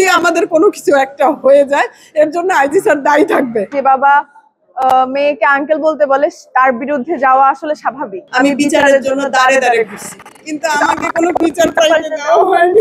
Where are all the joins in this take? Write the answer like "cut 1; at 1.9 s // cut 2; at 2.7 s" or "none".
cut 1; at 3.7 s // cut 2; at 8.2 s